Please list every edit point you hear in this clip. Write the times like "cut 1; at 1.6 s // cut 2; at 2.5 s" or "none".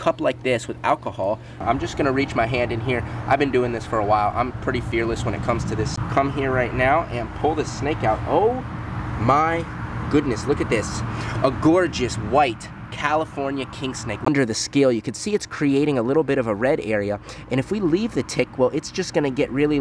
cut 1; at 1.6 s // cut 2; at 5.9 s // cut 3; at 14.3 s